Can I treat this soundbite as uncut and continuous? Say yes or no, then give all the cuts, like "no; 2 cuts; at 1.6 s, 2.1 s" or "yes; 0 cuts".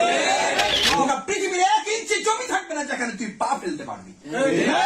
no; 1 cut; at 1.0 s